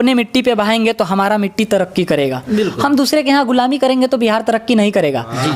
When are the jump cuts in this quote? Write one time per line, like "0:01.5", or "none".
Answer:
none